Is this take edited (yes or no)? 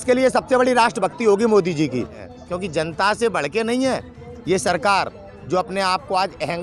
yes